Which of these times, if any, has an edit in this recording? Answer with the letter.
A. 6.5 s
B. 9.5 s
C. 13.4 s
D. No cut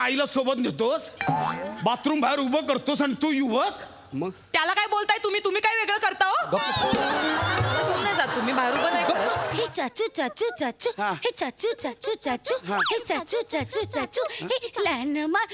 B